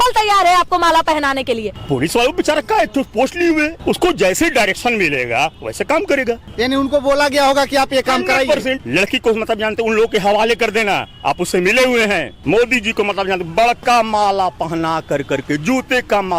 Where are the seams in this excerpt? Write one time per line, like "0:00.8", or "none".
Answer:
0:01.7
0:03.8
0:06.5
0:08.8
0:12.3